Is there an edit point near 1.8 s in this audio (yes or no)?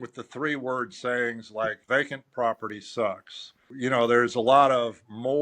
yes